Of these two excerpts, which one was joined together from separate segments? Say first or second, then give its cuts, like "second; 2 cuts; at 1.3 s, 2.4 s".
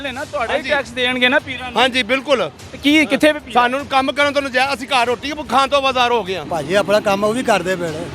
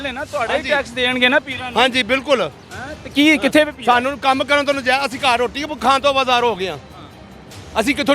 first; 2 cuts; at 2.6 s, 6.4 s